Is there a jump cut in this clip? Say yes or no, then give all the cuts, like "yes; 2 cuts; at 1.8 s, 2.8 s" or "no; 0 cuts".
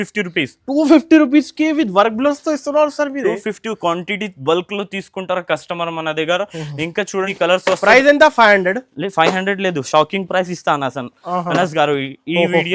yes; 1 cut; at 7.3 s